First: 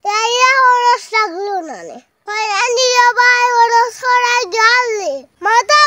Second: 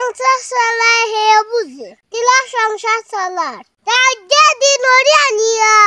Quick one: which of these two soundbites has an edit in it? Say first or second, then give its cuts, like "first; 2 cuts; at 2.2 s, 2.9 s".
first; 1 cut; at 2.2 s